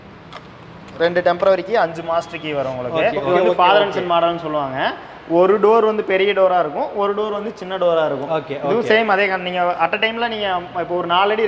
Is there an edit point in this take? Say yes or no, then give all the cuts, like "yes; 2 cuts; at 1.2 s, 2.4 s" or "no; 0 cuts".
yes; 1 cut; at 3.3 s